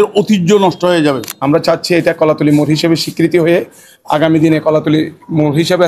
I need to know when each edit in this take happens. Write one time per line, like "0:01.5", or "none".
0:01.3